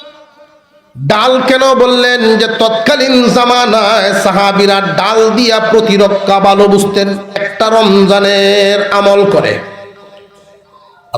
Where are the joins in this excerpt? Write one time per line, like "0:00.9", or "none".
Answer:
0:07.5